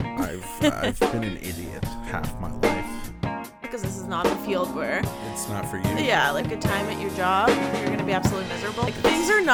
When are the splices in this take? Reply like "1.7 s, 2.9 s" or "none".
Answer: none

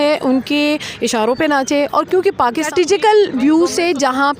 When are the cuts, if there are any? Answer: 2.7 s

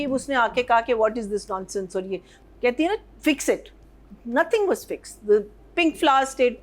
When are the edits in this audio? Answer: 2.4 s

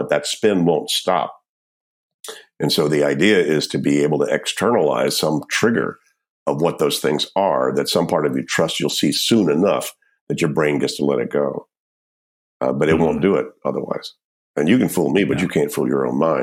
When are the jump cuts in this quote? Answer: none

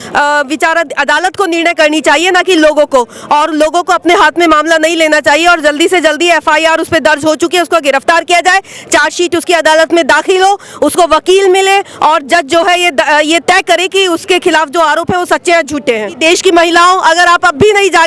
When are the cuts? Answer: 16.2 s

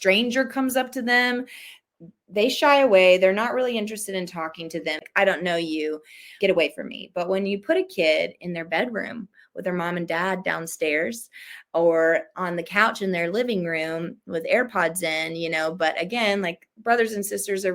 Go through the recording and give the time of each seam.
5.0 s, 6.3 s

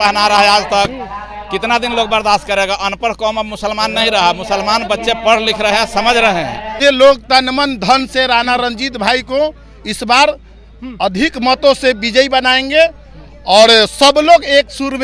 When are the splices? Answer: 6.7 s

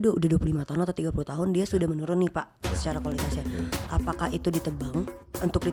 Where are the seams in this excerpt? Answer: none

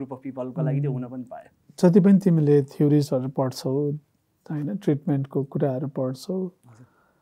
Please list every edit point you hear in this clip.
1.6 s

